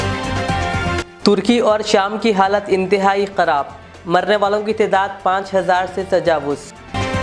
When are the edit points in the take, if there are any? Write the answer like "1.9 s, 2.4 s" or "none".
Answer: 1.0 s